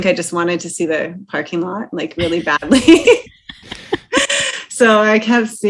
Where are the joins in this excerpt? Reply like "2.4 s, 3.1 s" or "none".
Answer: none